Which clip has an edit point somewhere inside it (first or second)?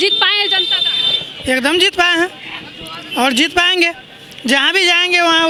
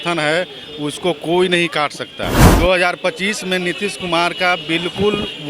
second